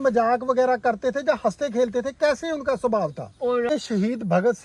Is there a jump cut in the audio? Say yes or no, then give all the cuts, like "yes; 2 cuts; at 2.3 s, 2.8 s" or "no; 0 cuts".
yes; 1 cut; at 3.7 s